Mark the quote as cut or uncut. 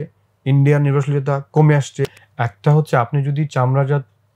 cut